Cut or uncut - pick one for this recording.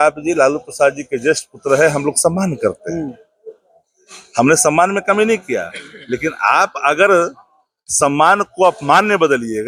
uncut